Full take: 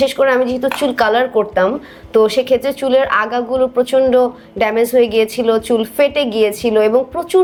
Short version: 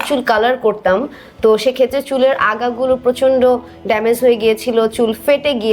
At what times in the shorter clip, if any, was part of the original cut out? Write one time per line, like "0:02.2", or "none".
none